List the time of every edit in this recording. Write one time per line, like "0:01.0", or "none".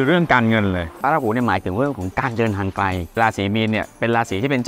0:01.0
0:03.2